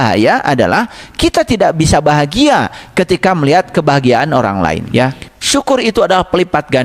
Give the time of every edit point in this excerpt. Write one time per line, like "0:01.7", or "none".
0:04.8